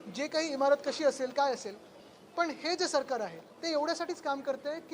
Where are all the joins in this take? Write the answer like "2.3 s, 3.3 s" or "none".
3.5 s